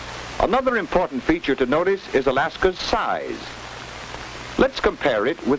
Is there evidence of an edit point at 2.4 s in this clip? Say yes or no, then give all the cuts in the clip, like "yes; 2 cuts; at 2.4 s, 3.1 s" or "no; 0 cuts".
no; 1 cut; at 3.7 s